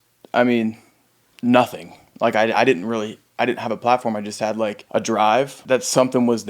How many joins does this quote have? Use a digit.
2